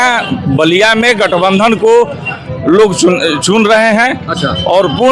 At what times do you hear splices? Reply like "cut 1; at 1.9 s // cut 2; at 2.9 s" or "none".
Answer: none